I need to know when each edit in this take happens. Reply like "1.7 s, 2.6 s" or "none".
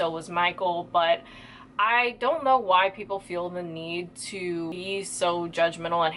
4.7 s